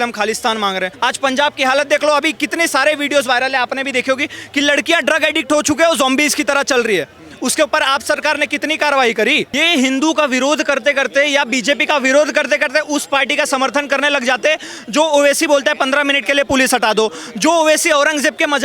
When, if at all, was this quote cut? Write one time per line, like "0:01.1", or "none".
0:00.9
0:09.5